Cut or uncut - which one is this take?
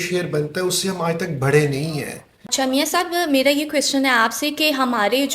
cut